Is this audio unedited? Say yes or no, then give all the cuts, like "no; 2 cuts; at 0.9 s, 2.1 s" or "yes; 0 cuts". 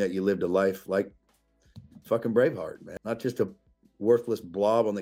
no; 1 cut; at 2.9 s